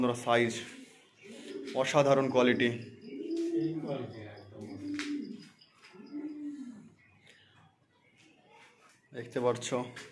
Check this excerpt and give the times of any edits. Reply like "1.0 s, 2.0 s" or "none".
none